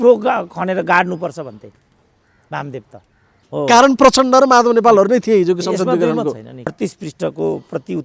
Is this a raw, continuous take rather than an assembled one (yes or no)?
no